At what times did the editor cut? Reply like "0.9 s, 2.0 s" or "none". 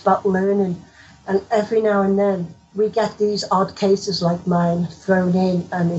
2.6 s

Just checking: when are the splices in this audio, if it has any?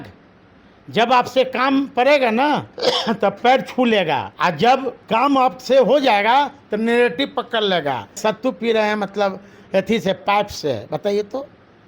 2.7 s, 4.3 s, 5.0 s, 8.2 s

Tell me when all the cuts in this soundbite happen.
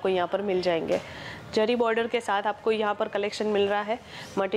none

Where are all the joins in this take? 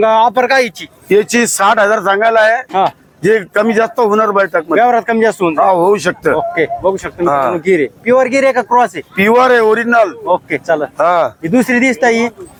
none

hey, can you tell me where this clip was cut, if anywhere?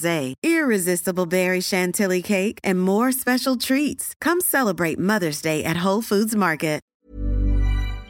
6.9 s

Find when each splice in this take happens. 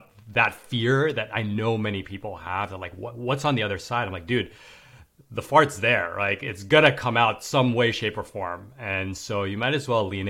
none

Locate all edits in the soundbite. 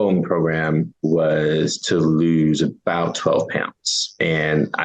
0.9 s

